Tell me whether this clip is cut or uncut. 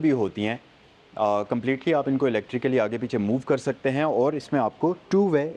uncut